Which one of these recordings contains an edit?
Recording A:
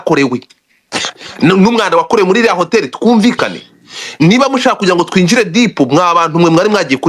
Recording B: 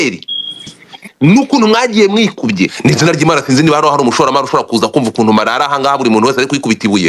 B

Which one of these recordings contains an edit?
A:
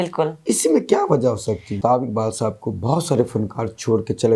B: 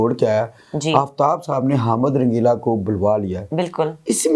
A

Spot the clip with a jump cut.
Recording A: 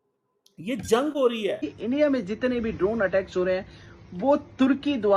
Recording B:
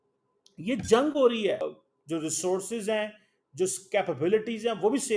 A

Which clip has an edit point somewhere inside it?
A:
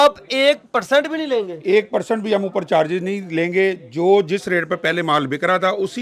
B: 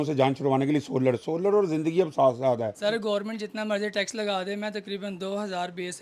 B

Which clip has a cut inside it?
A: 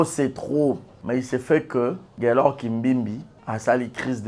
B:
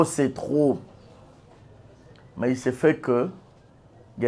A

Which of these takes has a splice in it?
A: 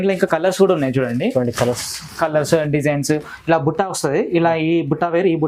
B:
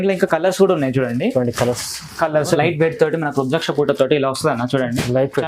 B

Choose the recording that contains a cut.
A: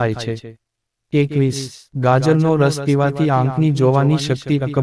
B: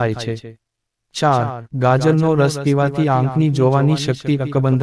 B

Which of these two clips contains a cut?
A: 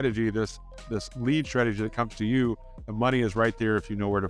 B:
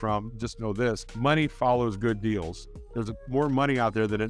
B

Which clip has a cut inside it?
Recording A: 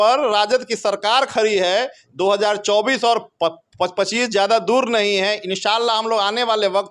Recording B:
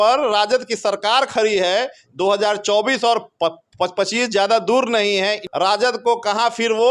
B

